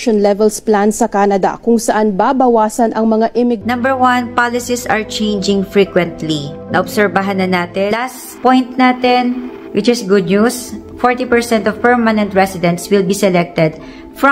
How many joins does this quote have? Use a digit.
2